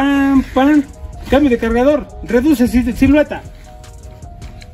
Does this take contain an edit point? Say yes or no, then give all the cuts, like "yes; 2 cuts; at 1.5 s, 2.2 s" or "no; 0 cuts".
no; 0 cuts